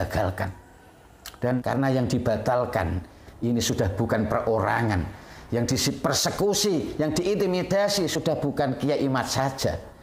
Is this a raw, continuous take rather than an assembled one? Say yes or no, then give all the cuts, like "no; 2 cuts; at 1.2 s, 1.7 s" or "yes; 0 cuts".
no; 1 cut; at 1.6 s